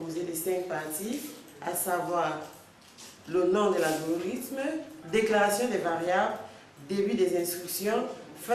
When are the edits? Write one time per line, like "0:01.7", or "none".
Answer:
0:04.9